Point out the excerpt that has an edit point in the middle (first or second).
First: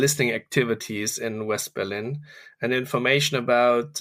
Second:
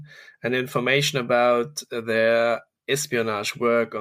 second